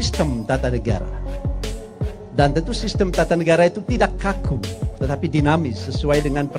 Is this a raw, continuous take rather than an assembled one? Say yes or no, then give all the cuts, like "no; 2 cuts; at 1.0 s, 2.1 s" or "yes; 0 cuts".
yes; 0 cuts